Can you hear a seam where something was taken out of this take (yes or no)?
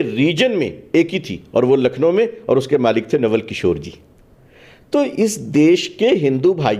no